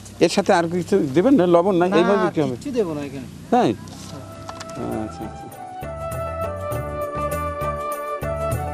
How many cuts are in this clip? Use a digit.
0